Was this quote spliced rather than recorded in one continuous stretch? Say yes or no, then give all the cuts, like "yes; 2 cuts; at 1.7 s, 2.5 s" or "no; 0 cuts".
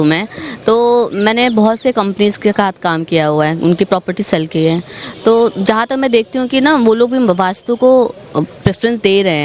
no; 0 cuts